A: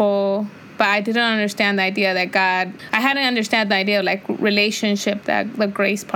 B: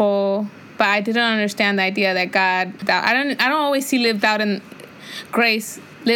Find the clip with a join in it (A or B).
B